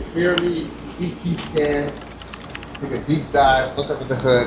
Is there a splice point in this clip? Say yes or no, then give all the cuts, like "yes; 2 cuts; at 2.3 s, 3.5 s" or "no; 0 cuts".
no; 0 cuts